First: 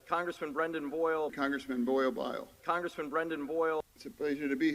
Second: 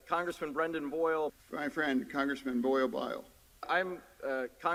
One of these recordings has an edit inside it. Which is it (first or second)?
first